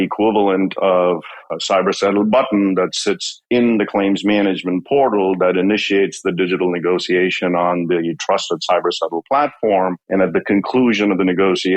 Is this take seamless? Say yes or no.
yes